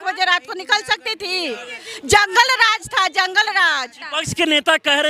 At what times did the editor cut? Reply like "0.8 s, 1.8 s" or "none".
4.0 s